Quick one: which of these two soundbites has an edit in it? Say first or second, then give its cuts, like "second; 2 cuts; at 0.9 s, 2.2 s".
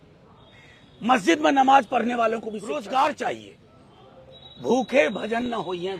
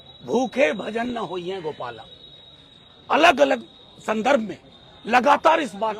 first; 1 cut; at 2.7 s